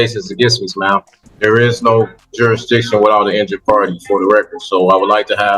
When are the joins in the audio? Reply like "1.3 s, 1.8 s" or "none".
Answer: 1.2 s